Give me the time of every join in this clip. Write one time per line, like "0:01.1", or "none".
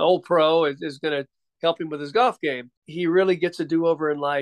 0:02.8